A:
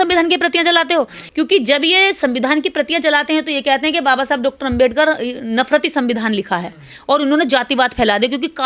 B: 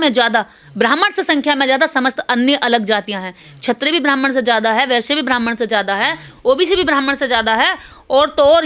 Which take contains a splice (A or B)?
A